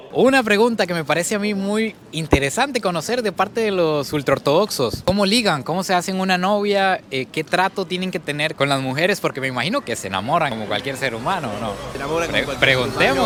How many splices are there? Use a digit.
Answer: 0